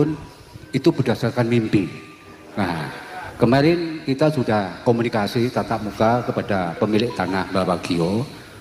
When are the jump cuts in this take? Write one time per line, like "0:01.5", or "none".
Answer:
none